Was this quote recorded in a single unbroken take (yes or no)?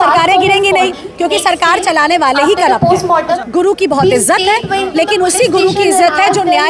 yes